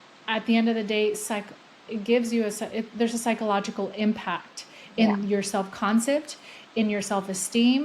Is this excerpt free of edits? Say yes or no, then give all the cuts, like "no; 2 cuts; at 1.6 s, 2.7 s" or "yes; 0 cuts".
yes; 0 cuts